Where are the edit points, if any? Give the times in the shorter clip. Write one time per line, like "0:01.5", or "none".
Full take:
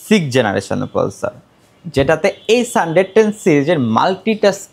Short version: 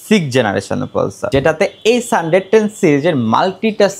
0:01.2